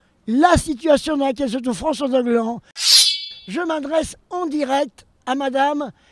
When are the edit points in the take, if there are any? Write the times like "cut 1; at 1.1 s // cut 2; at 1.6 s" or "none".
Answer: cut 1; at 3.0 s